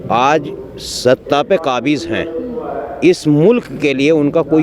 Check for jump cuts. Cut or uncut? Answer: uncut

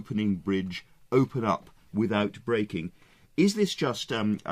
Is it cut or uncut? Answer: cut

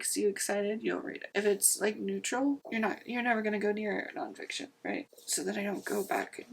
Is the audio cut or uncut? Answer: cut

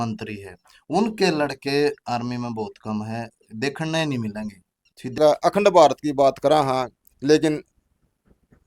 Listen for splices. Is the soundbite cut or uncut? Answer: cut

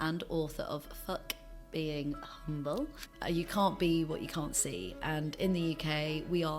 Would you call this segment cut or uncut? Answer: cut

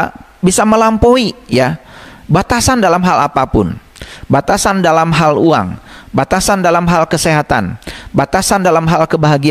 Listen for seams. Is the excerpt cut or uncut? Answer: uncut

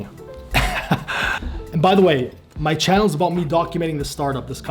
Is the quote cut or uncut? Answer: cut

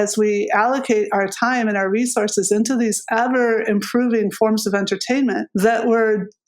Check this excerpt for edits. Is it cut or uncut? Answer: cut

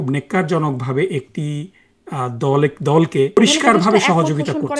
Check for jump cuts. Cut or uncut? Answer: cut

